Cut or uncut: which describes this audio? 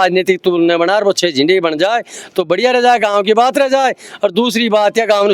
uncut